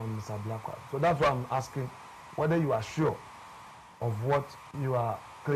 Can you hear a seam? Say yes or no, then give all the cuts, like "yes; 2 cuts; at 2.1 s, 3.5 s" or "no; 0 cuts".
yes; 1 cut; at 4.6 s